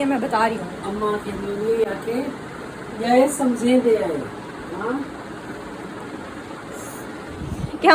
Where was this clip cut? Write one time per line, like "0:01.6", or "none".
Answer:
none